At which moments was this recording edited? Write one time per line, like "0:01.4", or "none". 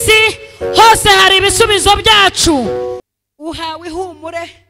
0:03.0